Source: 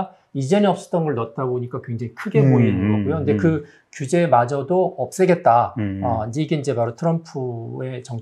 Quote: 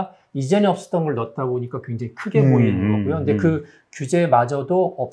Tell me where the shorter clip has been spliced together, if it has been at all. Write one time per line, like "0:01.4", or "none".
none